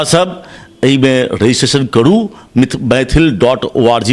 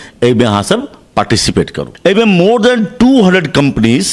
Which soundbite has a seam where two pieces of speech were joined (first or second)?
second